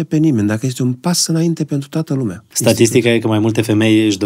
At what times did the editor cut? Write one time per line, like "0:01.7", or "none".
0:02.5